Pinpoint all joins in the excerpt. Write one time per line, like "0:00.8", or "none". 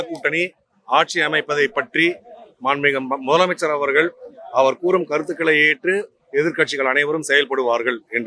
none